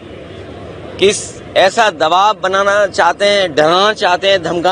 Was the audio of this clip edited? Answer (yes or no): no